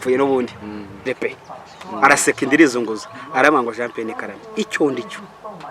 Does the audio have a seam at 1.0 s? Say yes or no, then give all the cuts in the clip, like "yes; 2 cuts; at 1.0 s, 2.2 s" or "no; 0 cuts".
yes; 1 cut; at 1.0 s